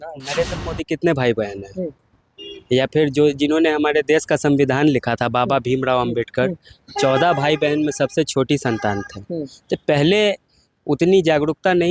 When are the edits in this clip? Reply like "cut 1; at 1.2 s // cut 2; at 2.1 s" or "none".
none